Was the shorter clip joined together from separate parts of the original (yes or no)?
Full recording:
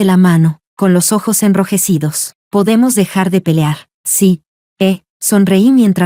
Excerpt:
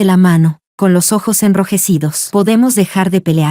yes